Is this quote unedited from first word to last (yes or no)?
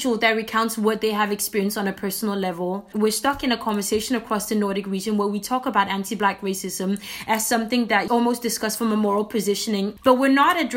no